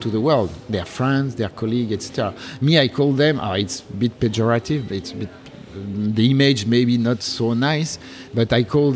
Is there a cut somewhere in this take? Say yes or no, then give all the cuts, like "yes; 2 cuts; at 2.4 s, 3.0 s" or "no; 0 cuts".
no; 0 cuts